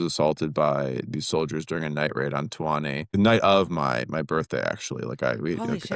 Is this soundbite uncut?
no; 1 cut; at 3.1 s

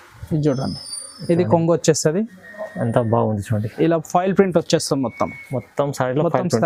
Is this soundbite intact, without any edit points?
yes; 0 cuts

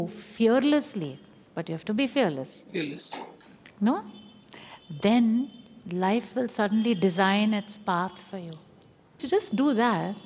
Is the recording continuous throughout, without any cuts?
no; 1 cut; at 9.2 s

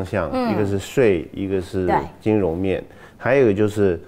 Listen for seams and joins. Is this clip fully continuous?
yes; 0 cuts

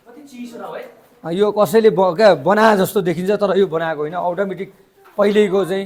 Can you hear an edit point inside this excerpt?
no; 0 cuts

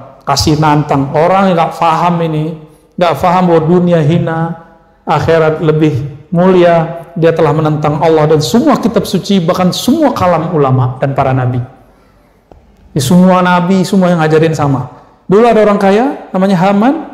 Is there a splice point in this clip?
no; 0 cuts

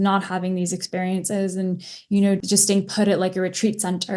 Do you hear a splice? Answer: yes; 1 cut; at 2.4 s

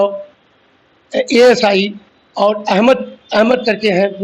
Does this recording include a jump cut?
no; 0 cuts

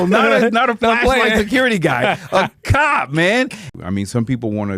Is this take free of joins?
no; 1 cut; at 3.7 s

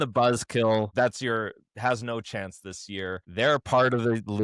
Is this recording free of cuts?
no; 2 cuts; at 0.9 s, 3.2 s

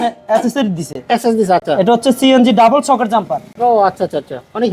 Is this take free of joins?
yes; 0 cuts

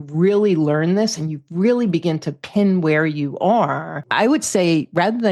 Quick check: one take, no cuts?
no; 1 cut; at 4.0 s

